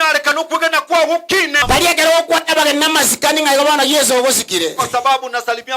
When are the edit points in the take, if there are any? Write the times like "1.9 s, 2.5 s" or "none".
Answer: 1.6 s